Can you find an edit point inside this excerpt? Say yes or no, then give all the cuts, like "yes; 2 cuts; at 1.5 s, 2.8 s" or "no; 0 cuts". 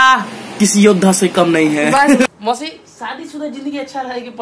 yes; 1 cut; at 2.2 s